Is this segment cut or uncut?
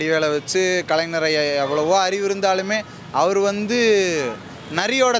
uncut